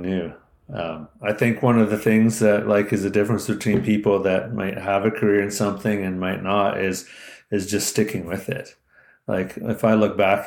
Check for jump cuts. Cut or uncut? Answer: cut